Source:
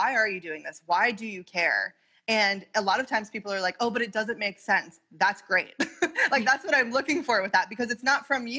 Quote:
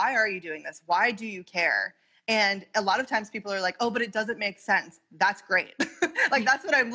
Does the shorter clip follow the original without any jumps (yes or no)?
yes